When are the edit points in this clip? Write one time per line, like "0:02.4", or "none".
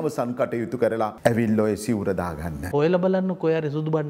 0:01.1
0:02.7